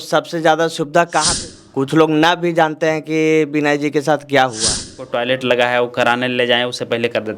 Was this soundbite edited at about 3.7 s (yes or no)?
no